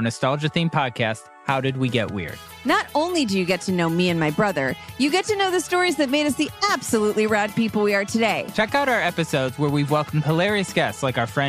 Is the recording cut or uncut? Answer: cut